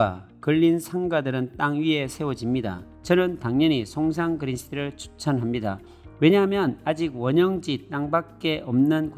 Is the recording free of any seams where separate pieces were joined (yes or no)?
no